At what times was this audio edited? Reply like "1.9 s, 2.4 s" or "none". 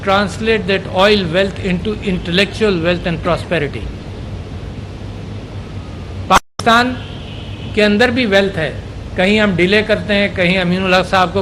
10.5 s